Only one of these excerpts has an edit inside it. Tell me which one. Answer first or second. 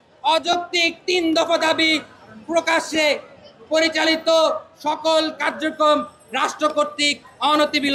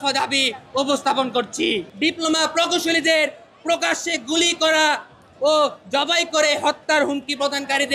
second